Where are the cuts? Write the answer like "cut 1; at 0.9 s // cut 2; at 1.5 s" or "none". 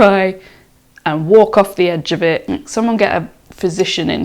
cut 1; at 2.5 s